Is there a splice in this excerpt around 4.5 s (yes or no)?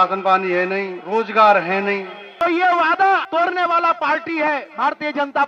no